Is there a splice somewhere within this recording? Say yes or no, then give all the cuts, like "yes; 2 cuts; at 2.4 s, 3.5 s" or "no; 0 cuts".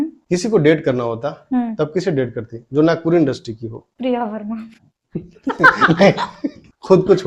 no; 0 cuts